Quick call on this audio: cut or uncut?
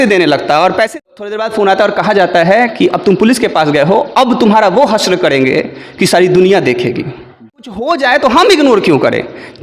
cut